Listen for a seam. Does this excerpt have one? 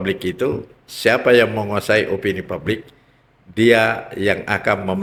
no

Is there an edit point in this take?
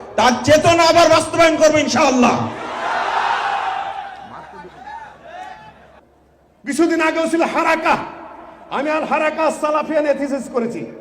yes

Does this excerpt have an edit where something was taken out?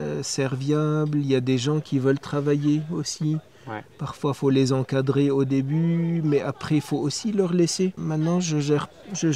no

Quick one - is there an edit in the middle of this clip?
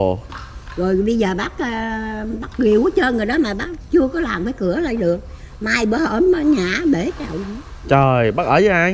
no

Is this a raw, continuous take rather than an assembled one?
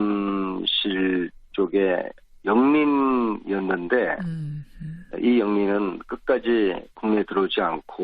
no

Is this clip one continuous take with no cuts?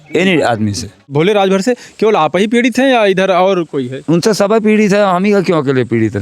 no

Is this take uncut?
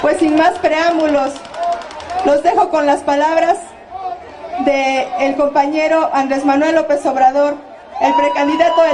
yes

